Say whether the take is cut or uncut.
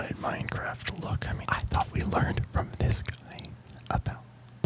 cut